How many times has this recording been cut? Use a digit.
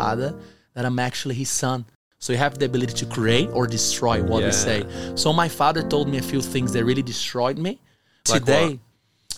2